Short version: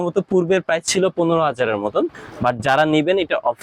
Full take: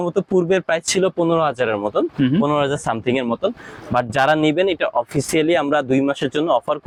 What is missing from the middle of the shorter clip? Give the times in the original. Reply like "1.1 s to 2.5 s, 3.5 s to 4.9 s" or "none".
2.1 s to 3.6 s